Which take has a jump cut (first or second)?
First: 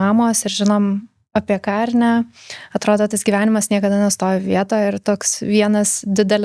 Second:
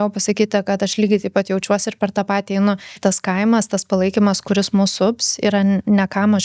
second